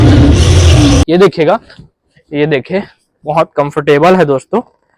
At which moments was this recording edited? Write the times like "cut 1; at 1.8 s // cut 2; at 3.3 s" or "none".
cut 1; at 1.0 s